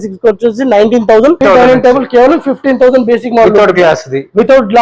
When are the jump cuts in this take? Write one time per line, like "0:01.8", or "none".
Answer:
0:01.4